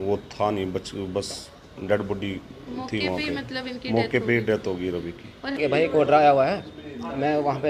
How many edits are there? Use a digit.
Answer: 1